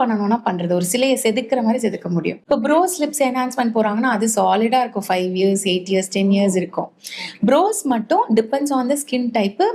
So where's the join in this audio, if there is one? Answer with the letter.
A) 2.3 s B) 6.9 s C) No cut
A